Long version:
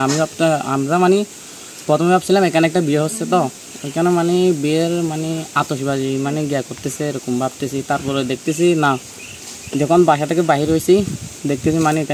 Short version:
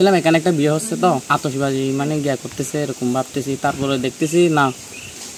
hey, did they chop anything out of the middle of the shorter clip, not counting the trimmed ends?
yes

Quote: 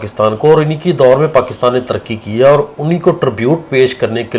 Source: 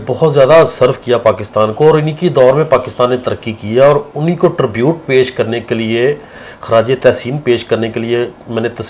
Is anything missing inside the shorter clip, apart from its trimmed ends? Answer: no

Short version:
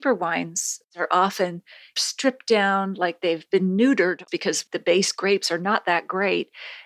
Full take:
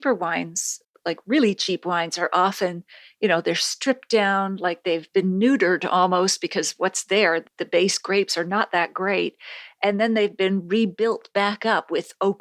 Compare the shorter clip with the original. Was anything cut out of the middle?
yes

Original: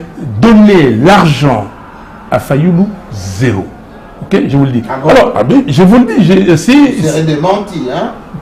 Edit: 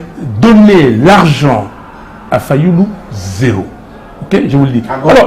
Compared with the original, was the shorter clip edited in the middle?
no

